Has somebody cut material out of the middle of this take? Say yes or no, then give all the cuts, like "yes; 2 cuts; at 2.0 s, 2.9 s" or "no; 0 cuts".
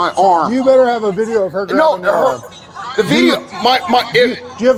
no; 0 cuts